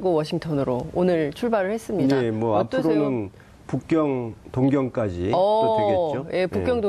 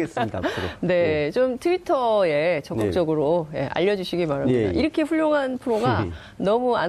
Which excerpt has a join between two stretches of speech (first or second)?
first